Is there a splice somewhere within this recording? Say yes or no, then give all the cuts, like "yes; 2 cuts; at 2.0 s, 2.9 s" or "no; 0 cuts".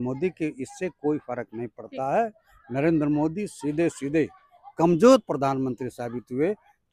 no; 0 cuts